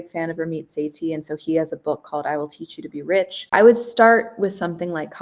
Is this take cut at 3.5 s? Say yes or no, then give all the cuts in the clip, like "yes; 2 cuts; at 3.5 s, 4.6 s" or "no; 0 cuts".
yes; 1 cut; at 3.5 s